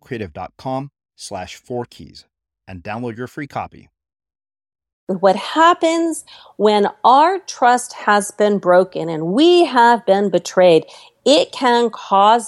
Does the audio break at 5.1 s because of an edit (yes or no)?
yes